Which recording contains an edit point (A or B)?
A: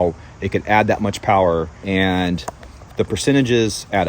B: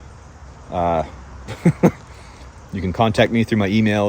A